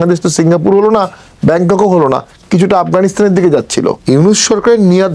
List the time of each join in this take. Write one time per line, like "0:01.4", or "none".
0:04.0